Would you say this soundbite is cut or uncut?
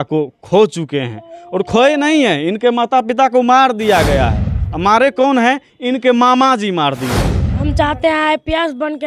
cut